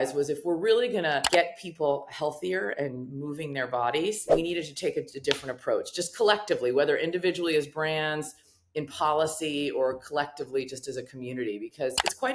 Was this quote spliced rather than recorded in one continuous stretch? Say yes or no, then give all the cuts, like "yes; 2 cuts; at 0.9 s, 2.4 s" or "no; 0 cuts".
yes; 2 cuts; at 1.2 s, 4.3 s